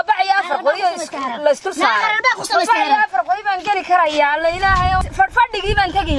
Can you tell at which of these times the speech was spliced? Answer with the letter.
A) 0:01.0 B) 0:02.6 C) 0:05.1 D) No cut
C